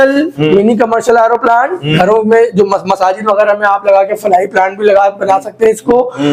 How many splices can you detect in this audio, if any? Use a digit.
0